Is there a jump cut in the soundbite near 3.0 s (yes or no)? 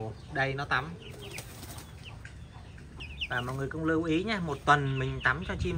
yes